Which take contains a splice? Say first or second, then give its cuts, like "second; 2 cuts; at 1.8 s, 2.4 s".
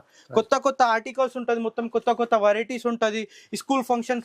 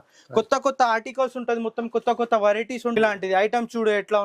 second; 1 cut; at 3.0 s